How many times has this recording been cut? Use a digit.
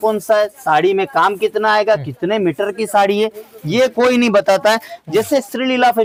0